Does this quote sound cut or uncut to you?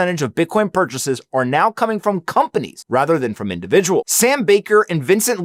uncut